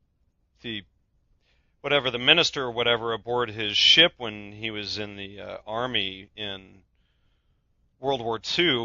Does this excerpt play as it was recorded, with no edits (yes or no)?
no